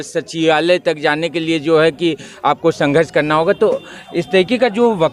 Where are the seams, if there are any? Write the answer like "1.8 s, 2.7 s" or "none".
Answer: none